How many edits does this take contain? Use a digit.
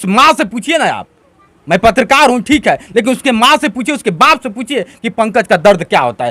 0